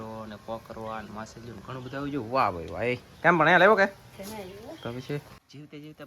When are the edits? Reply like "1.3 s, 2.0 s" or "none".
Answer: none